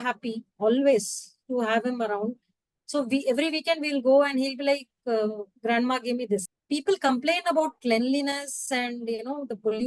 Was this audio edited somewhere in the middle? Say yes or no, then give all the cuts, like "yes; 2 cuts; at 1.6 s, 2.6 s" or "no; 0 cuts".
yes; 1 cut; at 6.5 s